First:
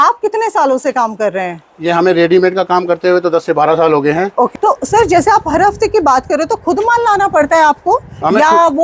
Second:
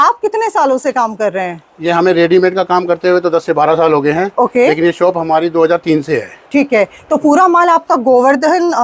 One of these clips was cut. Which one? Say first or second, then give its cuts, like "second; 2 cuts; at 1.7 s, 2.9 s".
first; 1 cut; at 4.5 s